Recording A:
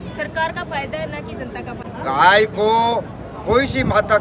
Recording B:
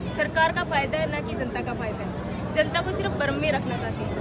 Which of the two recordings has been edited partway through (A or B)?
A